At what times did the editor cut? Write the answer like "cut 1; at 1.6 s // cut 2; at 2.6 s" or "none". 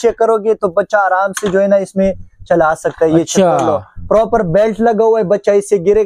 none